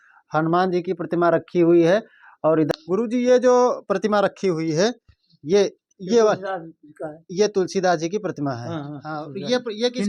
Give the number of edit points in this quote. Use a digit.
1